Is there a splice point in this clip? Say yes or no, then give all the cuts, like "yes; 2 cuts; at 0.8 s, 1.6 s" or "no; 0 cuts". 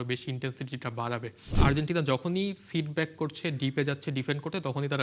yes; 1 cut; at 1.5 s